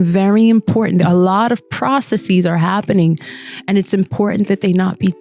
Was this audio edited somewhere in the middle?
no; 0 cuts

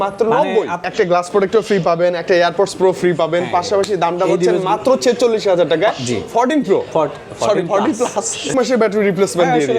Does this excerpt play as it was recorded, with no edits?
no; 2 cuts; at 0.8 s, 8.5 s

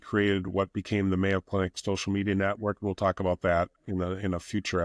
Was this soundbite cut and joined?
no; 0 cuts

